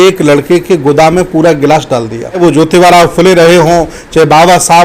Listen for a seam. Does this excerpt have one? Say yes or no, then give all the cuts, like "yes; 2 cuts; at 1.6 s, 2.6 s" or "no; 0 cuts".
yes; 1 cut; at 2.4 s